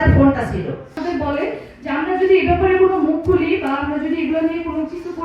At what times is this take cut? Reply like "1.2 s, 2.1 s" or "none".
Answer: 1.0 s

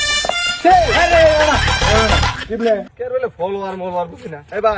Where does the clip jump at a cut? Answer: 2.9 s

